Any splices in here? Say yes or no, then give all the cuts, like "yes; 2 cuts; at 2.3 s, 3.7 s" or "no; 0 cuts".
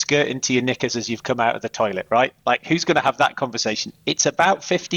no; 0 cuts